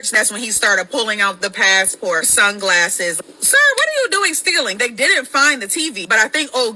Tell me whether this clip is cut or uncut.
uncut